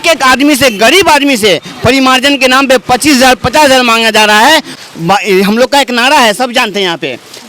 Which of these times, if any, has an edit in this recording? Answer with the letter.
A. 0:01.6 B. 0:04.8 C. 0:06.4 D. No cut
B